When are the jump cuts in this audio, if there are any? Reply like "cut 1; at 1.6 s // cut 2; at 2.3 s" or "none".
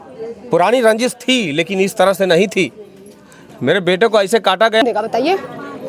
cut 1; at 4.8 s